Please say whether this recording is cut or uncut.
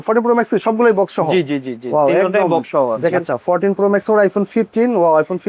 cut